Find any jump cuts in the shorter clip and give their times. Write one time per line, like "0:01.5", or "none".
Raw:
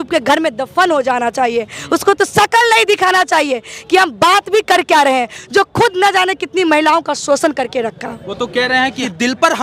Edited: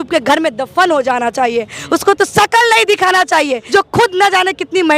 0:03.6